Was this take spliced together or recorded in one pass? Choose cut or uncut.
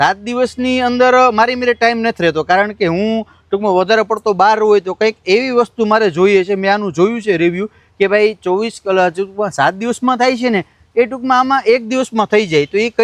uncut